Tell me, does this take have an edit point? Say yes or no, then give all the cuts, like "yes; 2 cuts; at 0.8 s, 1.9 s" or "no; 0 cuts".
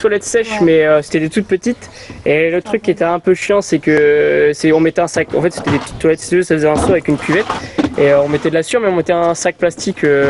no; 0 cuts